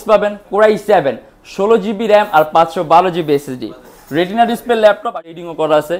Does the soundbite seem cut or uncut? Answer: cut